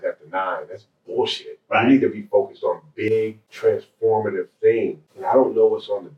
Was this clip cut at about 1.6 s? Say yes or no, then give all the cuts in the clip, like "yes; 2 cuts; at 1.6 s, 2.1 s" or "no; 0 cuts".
no; 2 cuts; at 3.4 s, 5.1 s